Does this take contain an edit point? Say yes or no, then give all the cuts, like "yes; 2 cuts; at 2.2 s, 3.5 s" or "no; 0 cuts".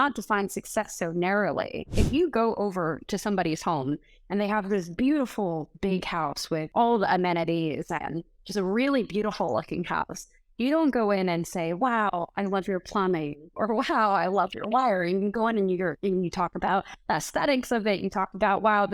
yes; 2 cuts; at 2.0 s, 6.7 s